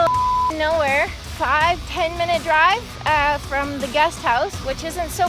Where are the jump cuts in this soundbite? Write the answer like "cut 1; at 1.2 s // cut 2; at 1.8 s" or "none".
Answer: cut 1; at 1.2 s

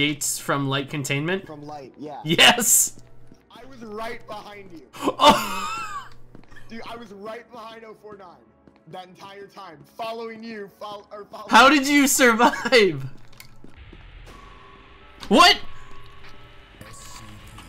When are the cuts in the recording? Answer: cut 1; at 13.8 s

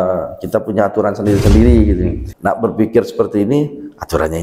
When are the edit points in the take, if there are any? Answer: cut 1; at 2.2 s

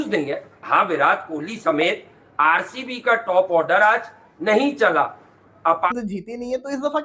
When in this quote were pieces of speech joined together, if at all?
cut 1; at 5.9 s

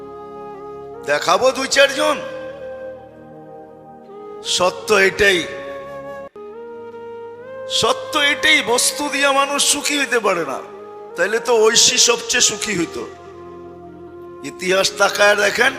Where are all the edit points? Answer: cut 1; at 5.5 s // cut 2; at 7.1 s // cut 3; at 13.1 s // cut 4; at 14.5 s

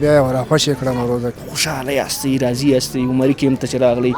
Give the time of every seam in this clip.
cut 1; at 1.4 s

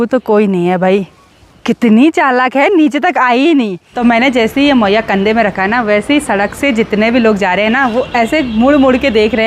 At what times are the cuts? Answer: cut 1; at 3.8 s

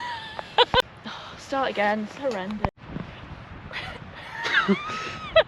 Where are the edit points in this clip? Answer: cut 1; at 1.0 s // cut 2; at 2.8 s

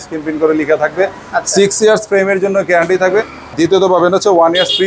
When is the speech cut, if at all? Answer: cut 1; at 3.5 s

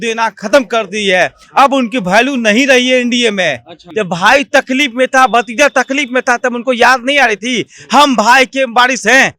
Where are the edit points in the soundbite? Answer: cut 1; at 3.8 s

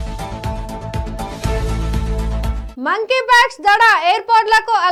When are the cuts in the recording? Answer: none

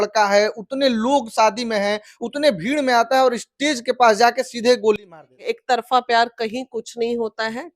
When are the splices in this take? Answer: cut 1; at 5.1 s

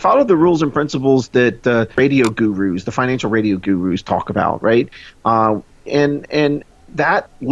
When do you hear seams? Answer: cut 1; at 2.0 s

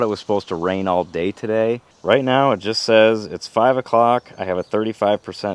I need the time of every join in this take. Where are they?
cut 1; at 1.9 s

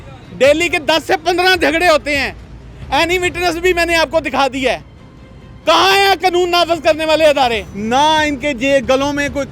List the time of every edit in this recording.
cut 1; at 7.7 s

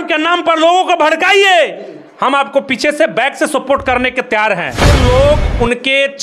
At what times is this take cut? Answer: cut 1; at 4.8 s

